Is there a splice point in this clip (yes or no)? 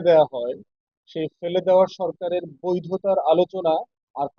no